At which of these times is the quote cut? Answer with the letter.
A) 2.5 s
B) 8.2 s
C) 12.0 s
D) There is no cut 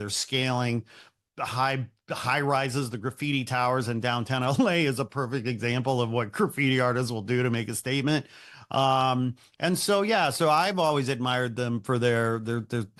D